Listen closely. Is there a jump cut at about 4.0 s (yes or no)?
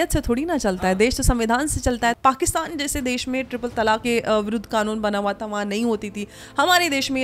yes